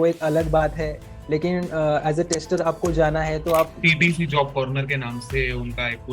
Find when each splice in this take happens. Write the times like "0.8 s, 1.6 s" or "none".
3.8 s